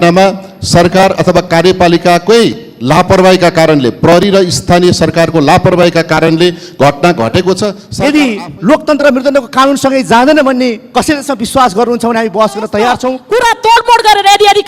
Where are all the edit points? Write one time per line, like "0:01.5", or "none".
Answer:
0:07.8
0:13.2